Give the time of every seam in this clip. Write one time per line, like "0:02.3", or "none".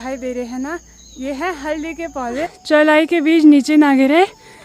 0:02.5